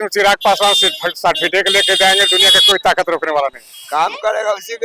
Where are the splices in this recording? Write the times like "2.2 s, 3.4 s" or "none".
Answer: 3.7 s